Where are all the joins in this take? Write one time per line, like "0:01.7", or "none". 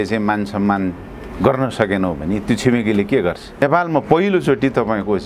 0:03.6